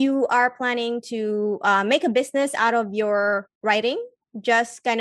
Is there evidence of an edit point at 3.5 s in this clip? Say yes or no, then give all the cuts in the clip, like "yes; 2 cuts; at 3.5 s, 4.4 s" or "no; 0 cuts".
yes; 1 cut; at 3.5 s